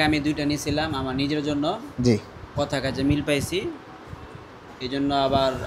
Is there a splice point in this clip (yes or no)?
no